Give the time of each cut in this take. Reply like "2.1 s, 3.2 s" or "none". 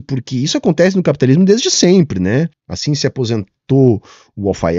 2.7 s